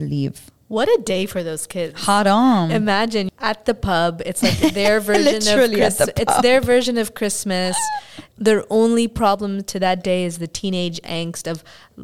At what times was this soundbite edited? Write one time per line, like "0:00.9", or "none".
none